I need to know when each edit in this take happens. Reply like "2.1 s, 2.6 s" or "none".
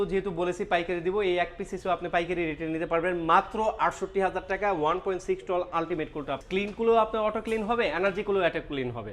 6.4 s

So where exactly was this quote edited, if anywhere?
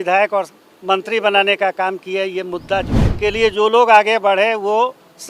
3.0 s

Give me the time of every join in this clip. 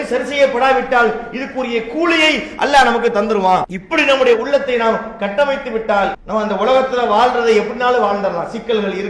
3.8 s, 6.2 s

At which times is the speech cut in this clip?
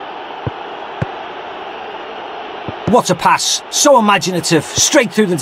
2.9 s

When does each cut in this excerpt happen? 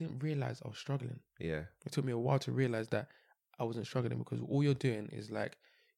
none

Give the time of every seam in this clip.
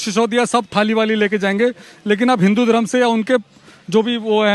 none

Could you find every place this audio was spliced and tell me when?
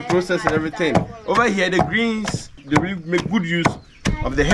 2.6 s

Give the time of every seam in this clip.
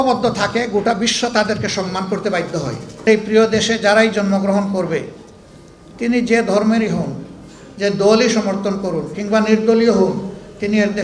3.1 s

